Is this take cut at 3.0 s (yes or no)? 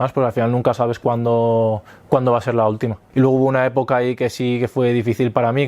yes